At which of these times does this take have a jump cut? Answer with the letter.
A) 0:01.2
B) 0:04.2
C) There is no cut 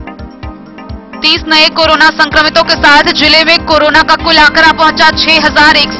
A